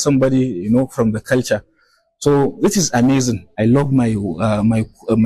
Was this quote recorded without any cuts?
no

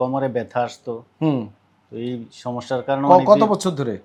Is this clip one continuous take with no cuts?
yes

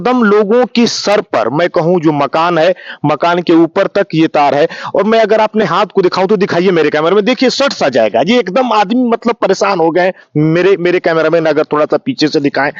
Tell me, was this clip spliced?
no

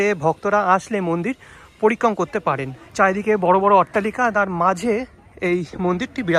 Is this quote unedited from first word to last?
no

